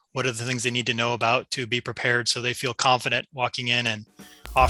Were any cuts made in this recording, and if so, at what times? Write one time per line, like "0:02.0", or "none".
none

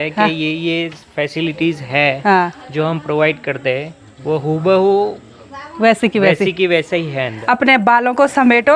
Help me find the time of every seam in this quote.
0:07.3

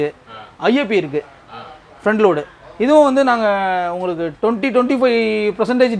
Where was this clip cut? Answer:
none

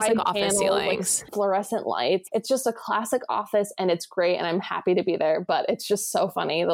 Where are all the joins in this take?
0:01.3
0:02.2

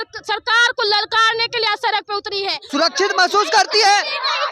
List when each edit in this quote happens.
0:02.7

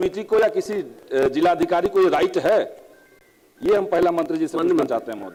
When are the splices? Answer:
none

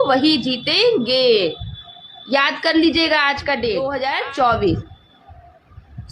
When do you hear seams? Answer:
0:03.9

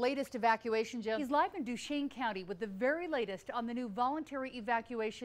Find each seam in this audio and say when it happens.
0:01.2

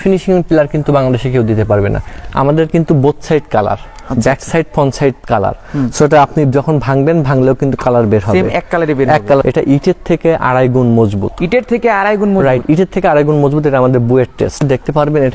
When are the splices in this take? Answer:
0:02.1
0:09.4
0:14.6

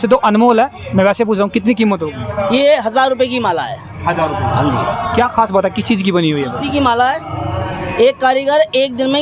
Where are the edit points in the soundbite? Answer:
none

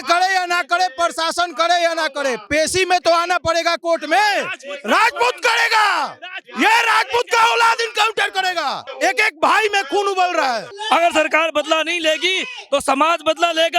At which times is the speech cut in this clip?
0:08.8
0:10.7

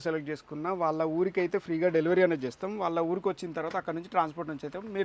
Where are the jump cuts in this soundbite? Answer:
none

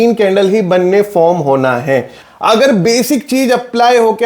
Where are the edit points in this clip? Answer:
0:02.2

